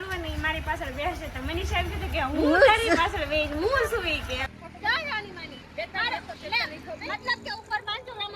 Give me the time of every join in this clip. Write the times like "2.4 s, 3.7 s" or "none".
4.4 s

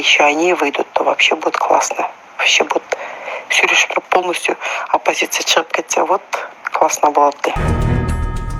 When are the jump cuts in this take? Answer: 7.7 s

